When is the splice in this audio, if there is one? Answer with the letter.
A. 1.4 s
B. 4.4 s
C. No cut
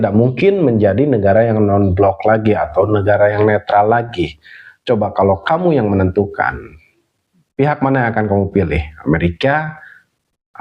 C